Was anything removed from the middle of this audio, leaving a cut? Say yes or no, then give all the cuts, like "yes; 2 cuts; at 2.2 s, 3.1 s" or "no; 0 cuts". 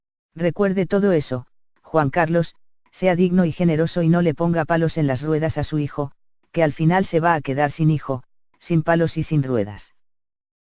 no; 0 cuts